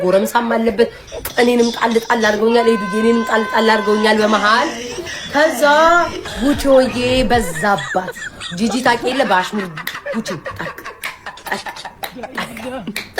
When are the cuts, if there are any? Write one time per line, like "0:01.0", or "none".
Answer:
none